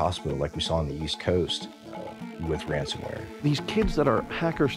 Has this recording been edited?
yes; 1 cut; at 3.5 s

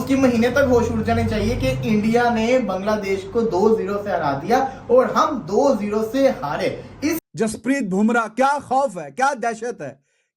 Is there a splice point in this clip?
yes; 1 cut; at 7.2 s

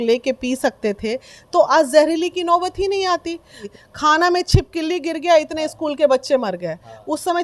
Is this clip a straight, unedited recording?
no; 1 cut; at 3.7 s

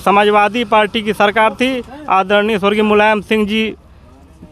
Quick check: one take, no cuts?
yes; 0 cuts

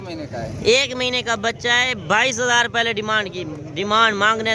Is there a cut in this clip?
no; 0 cuts

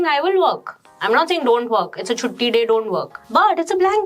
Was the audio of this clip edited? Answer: yes; 1 cut; at 3.2 s

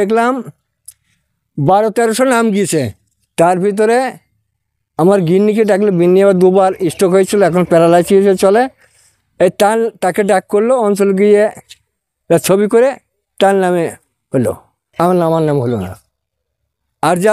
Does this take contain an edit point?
no; 0 cuts

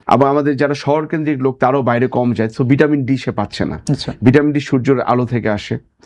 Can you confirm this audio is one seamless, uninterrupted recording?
yes; 0 cuts

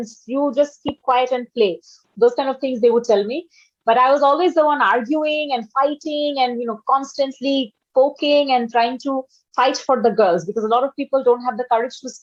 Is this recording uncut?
yes; 0 cuts

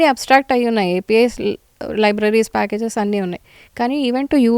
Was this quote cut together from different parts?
no; 0 cuts

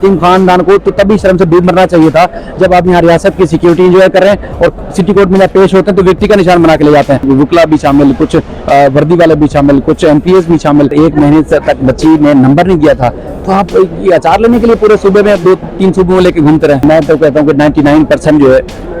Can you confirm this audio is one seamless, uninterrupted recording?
no; 3 cuts; at 7.2 s, 10.9 s, 16.8 s

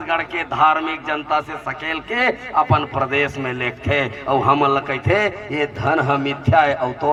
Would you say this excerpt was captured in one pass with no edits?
yes; 0 cuts

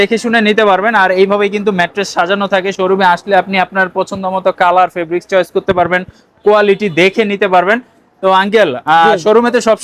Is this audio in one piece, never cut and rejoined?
yes; 0 cuts

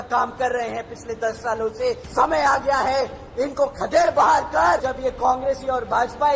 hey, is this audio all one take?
no; 2 cuts; at 2.0 s, 4.8 s

